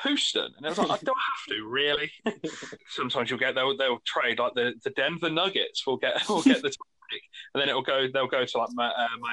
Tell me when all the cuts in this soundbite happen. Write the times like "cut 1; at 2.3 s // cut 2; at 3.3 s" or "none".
cut 1; at 2.8 s